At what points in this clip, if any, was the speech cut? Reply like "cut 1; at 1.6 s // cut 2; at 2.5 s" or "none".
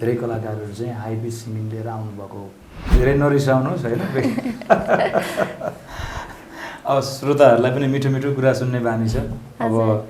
cut 1; at 2.9 s